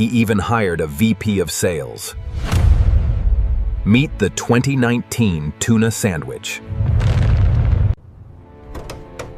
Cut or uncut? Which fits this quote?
cut